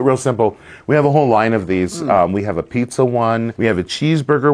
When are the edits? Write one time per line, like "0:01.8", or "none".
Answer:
0:03.5

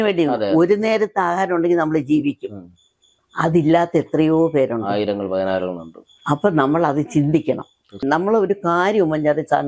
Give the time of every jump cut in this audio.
0:08.0

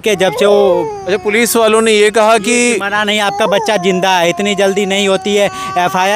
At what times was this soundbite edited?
none

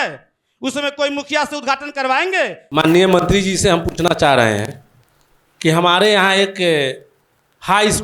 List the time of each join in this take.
0:02.6

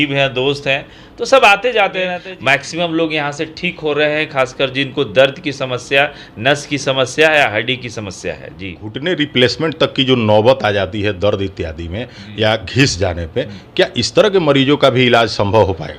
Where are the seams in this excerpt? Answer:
0:02.2
0:08.9

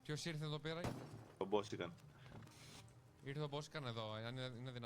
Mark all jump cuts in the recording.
0:01.2

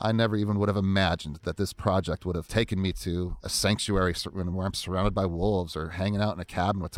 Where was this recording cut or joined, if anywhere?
0:02.5
0:03.4

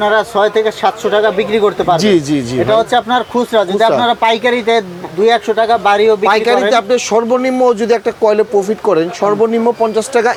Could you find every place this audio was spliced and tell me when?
none

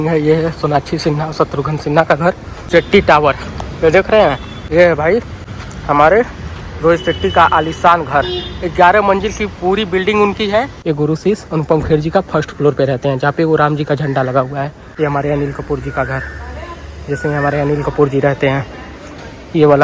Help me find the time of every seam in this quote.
0:02.5
0:04.5
0:10.7
0:14.8

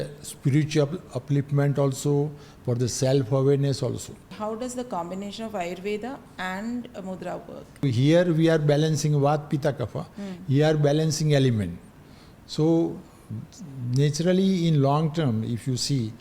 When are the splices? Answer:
0:04.3
0:07.8

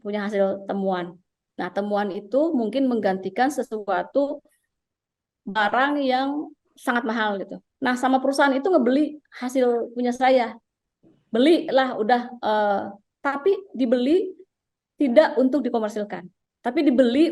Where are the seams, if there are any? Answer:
0:07.6

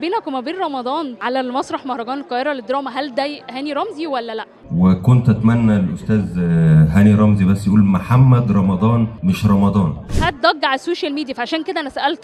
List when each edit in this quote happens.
0:01.2
0:04.7
0:10.1

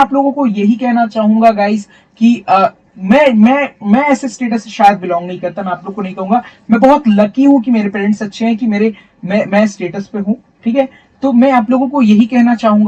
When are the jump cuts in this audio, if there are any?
none

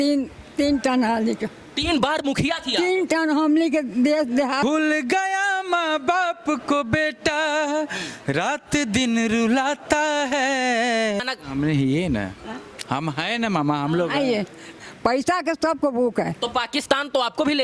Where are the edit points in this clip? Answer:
0:04.6
0:11.2
0:14.7

